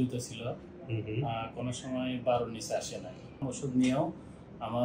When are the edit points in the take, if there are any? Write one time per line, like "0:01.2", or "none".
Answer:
0:03.4